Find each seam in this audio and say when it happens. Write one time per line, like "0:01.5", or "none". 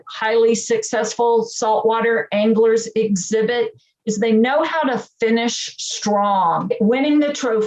0:06.8